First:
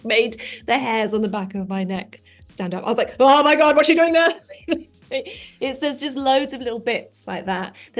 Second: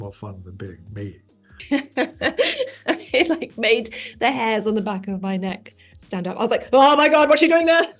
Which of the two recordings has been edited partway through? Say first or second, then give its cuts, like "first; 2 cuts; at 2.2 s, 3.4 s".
second; 1 cut; at 1.6 s